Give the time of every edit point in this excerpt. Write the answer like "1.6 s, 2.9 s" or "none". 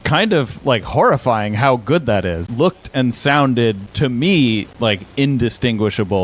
none